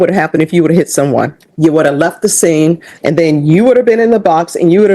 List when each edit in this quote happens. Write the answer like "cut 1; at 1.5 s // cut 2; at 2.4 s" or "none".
cut 1; at 1.4 s // cut 2; at 2.9 s